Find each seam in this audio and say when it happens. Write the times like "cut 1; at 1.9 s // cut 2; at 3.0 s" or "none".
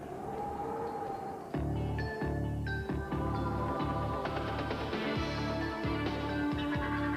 none